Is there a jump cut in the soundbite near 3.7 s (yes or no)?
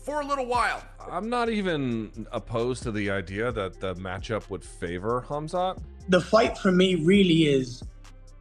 no